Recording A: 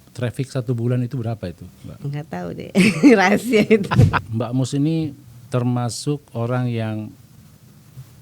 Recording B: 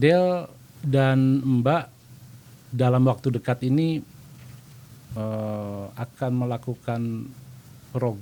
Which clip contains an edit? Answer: A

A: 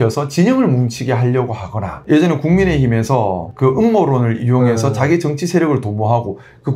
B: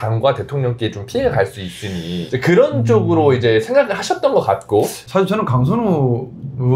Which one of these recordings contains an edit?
B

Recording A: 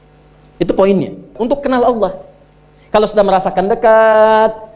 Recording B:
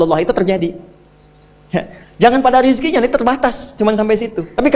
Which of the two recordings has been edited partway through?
A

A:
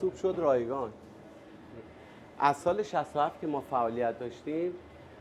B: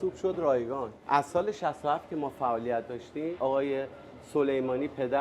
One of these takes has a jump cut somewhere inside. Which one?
B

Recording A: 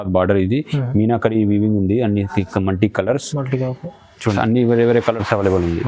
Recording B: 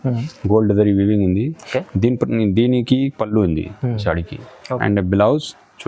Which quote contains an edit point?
A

